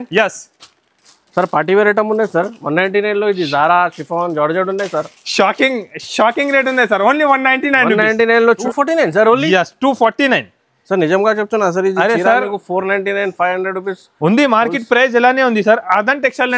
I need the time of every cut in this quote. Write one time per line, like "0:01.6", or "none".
0:08.6